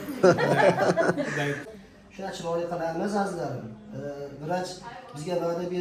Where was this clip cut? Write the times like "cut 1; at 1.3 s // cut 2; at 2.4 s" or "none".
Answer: cut 1; at 1.7 s